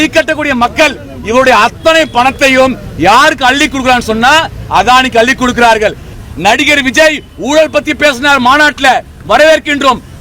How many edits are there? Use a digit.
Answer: 1